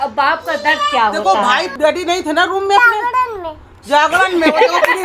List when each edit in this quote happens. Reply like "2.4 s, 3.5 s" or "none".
1.7 s